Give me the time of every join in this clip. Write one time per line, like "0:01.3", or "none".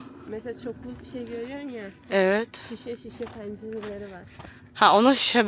none